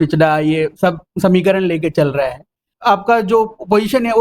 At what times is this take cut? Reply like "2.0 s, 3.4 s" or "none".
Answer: 2.7 s